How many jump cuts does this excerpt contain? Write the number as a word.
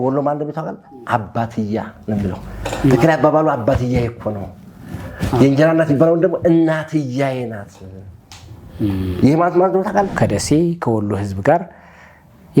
one